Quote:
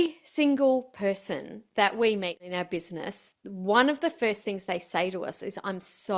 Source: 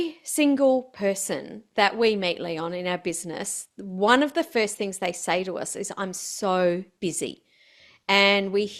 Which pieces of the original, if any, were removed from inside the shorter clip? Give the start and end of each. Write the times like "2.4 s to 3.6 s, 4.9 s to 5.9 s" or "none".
2.4 s to 2.7 s